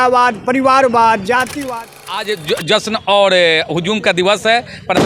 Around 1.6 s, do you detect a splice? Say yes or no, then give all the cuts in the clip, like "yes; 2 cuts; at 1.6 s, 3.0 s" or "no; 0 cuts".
yes; 1 cut; at 1.6 s